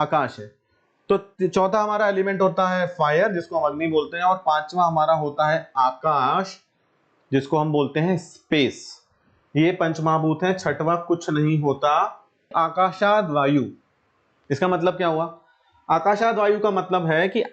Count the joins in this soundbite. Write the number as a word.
one